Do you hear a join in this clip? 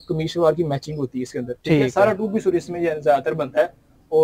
no; 0 cuts

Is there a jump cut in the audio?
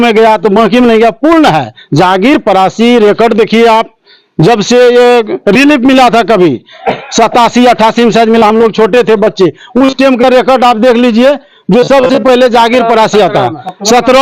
no; 0 cuts

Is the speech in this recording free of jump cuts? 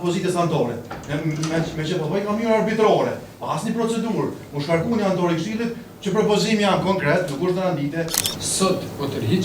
no; 1 cut; at 8.2 s

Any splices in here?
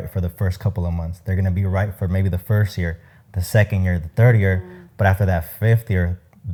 no; 0 cuts

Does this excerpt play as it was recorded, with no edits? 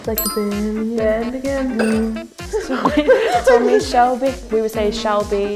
yes; 0 cuts

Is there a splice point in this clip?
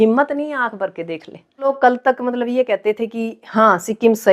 yes; 1 cut; at 1.7 s

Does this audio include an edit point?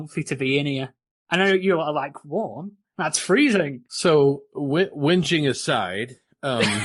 no; 0 cuts

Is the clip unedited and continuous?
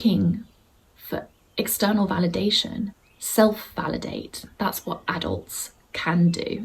no; 1 cut; at 3.0 s

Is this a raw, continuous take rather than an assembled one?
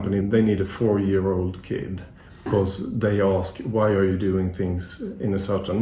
no; 1 cut; at 2.5 s

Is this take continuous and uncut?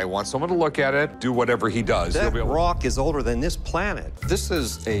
no; 2 cuts; at 1.1 s, 2.1 s

